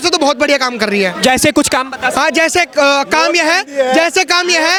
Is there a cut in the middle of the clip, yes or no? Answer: no